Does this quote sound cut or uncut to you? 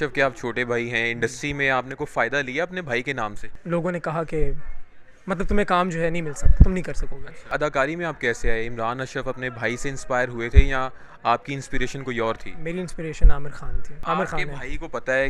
cut